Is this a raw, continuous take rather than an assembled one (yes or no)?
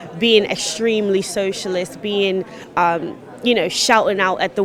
yes